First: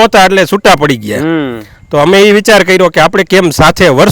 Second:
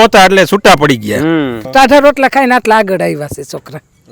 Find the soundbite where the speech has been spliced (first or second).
second